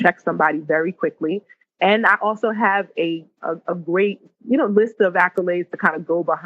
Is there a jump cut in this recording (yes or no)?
yes